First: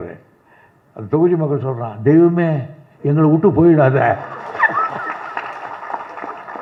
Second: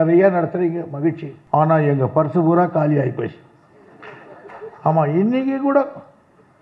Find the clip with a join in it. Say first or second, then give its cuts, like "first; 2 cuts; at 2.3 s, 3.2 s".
second; 1 cut; at 1.3 s